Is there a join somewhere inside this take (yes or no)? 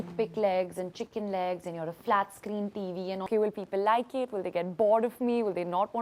yes